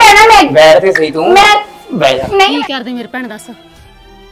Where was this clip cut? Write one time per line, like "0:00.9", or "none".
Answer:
0:02.5